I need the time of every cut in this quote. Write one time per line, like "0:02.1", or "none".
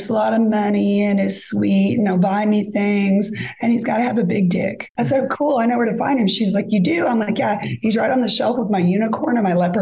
0:04.9

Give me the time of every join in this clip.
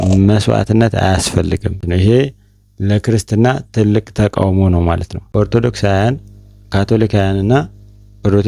0:01.8
0:05.2

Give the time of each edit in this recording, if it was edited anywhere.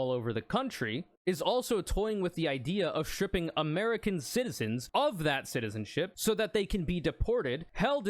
0:04.8
0:06.1

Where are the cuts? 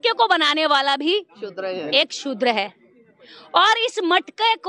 none

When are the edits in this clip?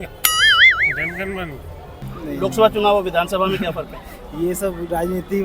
0:02.0

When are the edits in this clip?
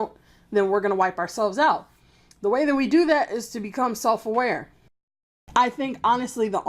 0:05.0

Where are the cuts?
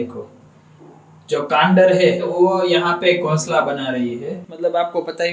0:04.4

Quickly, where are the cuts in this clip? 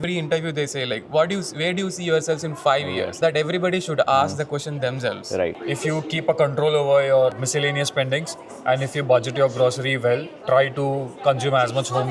0:05.6

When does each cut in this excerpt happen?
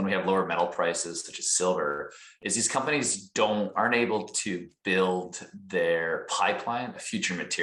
none

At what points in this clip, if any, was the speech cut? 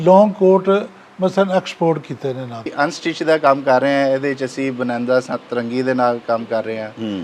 0:02.7

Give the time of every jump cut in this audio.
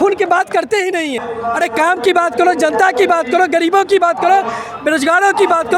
0:01.3

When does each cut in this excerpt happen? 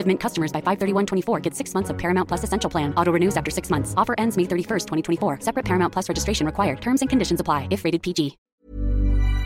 0:08.5

